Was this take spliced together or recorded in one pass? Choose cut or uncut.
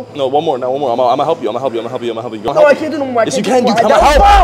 cut